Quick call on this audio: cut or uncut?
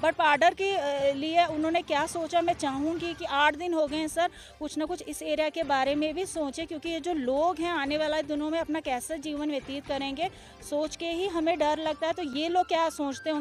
uncut